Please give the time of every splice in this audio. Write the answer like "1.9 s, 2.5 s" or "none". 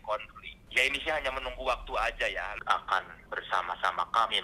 2.5 s